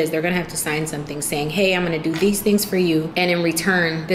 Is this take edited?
yes; 2 cuts; at 2.1 s, 3.1 s

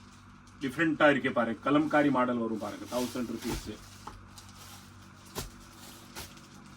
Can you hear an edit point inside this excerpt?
no; 0 cuts

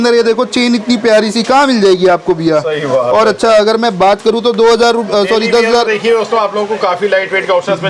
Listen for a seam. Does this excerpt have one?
no; 0 cuts

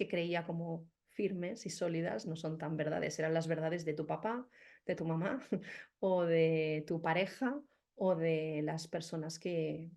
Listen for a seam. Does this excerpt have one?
no; 0 cuts

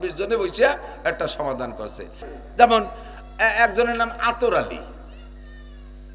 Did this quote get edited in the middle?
yes; 1 cut; at 2.3 s

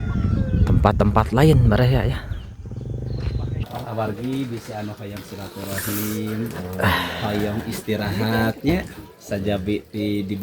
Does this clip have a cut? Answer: yes; 1 cut; at 3.6 s

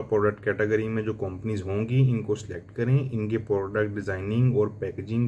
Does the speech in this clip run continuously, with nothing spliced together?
yes; 0 cuts

